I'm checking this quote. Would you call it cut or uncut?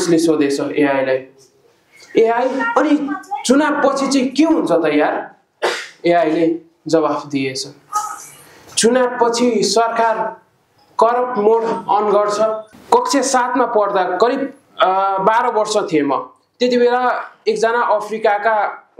cut